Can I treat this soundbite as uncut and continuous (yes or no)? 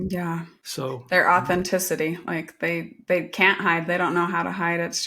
no